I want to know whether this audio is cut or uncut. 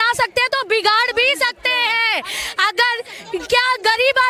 uncut